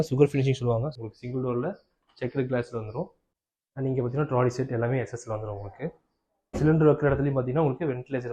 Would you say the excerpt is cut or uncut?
cut